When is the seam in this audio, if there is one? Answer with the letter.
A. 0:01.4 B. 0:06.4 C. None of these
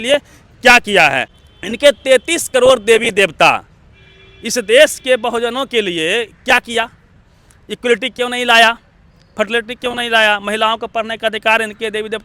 A